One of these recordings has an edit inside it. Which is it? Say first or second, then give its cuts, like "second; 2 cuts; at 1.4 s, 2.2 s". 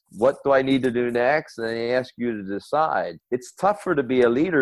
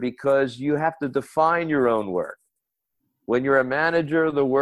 first; 1 cut; at 3.2 s